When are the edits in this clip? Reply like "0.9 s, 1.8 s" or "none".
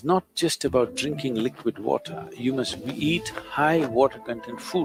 none

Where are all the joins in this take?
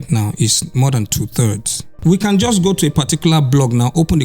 1.9 s

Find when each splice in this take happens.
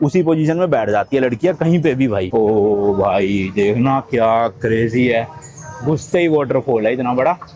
2.3 s

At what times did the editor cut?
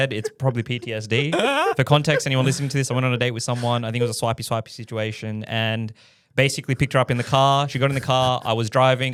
none

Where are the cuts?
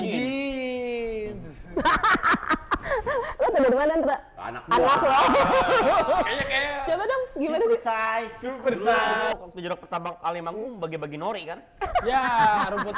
9.3 s

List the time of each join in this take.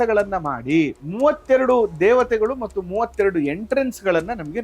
1.0 s

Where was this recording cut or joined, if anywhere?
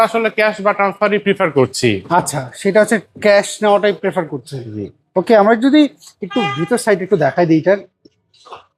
none

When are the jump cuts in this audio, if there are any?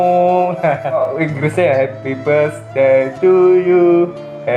1.0 s

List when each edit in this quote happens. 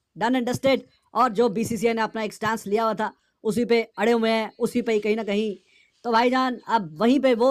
none

